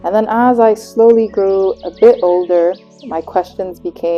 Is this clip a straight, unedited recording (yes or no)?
yes